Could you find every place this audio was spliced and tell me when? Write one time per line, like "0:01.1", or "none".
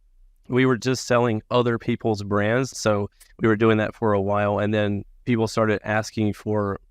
0:02.7
0:05.1